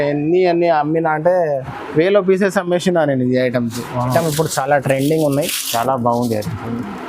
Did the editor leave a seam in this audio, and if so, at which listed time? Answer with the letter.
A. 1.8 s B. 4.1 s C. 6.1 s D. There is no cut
B